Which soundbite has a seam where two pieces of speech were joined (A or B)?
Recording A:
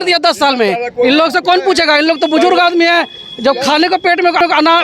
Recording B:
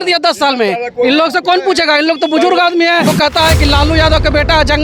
B